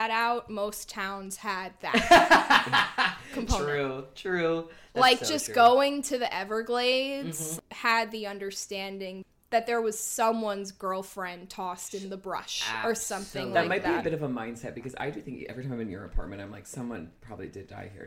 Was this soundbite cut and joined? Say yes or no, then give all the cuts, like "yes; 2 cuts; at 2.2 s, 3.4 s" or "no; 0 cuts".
yes; 2 cuts; at 7.5 s, 9.3 s